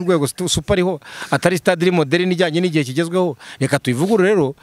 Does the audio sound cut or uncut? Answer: uncut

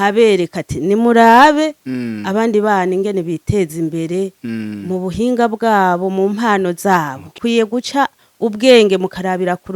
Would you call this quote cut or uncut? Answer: cut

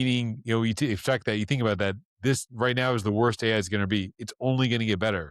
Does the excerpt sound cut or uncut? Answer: uncut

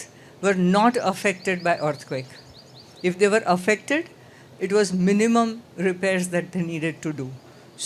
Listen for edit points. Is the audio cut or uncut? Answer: uncut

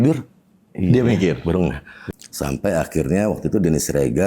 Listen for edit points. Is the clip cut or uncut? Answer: cut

